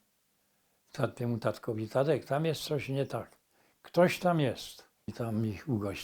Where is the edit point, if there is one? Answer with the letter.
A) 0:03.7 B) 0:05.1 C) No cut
B